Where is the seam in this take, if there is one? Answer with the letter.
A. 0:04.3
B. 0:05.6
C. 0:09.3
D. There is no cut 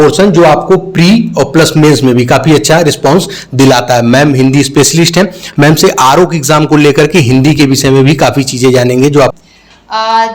C